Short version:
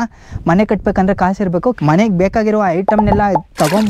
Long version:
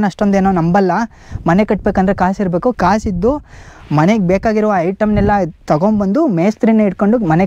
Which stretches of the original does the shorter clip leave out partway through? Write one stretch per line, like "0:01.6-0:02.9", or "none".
0:02.8-0:03.9